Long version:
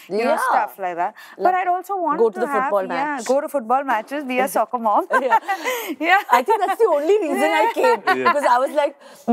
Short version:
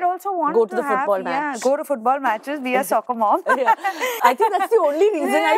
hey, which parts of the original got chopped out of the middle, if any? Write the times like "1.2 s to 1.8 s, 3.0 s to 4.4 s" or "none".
5.8 s to 6.2 s